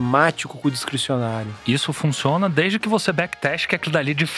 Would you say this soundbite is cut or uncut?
cut